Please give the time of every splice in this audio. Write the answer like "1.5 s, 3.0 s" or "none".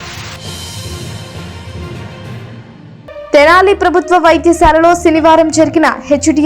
2.9 s